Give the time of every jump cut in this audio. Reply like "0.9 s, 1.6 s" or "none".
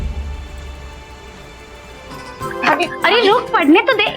2.2 s